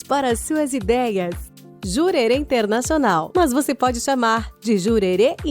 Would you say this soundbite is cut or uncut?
cut